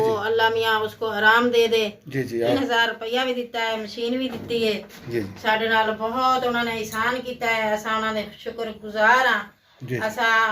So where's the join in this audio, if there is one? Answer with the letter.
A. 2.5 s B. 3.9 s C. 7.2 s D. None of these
A